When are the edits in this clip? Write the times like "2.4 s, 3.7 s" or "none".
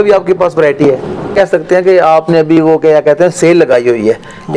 1.3 s